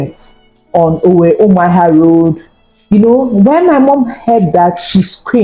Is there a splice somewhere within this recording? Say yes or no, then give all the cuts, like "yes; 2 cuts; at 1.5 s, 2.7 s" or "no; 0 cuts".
no; 0 cuts